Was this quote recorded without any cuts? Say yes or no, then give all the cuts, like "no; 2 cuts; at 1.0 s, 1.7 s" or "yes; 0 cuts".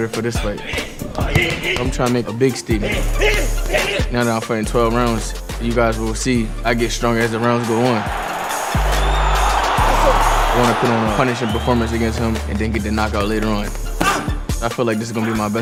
yes; 0 cuts